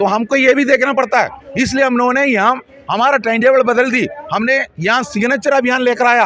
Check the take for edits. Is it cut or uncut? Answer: uncut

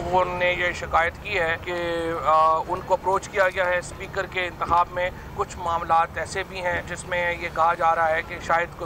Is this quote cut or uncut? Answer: uncut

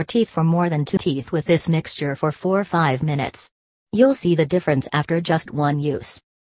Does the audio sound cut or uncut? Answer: uncut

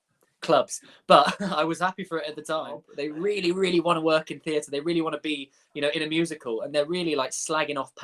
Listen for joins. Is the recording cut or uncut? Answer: cut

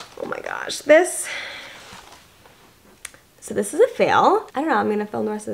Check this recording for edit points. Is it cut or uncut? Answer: cut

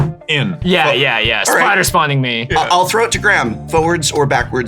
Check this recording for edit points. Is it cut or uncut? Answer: cut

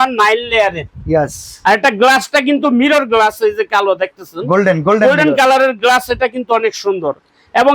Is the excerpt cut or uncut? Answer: uncut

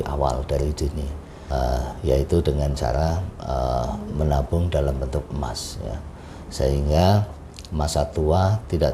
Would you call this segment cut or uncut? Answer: cut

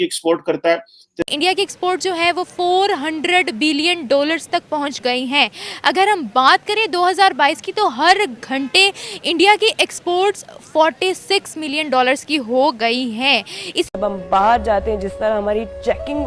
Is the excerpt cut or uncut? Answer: cut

